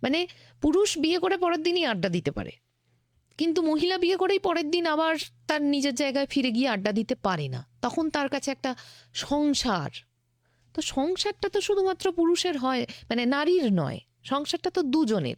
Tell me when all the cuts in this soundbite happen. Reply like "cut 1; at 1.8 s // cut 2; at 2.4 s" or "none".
none